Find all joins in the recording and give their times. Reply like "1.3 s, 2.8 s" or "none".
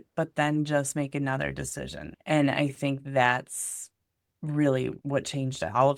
2.1 s, 5.0 s